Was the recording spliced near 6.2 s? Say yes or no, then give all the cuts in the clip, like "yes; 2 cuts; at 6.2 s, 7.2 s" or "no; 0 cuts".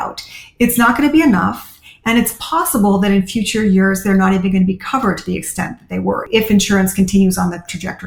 yes; 1 cut; at 6.2 s